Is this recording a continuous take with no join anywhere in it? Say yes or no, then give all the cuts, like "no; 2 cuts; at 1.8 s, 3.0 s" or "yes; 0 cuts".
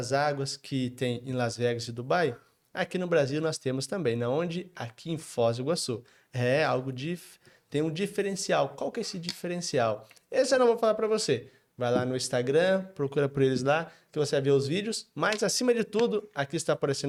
yes; 0 cuts